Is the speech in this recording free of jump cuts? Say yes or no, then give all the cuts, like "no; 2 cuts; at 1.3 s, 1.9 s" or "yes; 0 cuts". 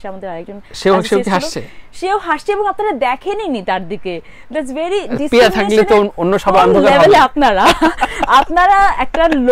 yes; 0 cuts